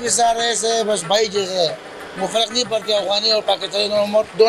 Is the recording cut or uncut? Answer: uncut